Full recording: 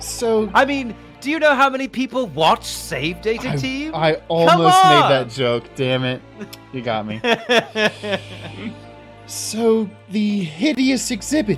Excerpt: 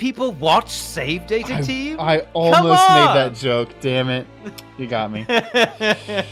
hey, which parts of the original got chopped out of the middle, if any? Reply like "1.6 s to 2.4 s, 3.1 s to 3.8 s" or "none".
none